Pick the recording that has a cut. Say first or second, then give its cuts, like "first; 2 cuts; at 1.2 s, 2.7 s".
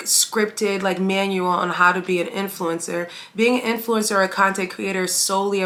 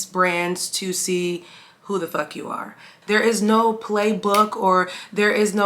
second; 1 cut; at 2.9 s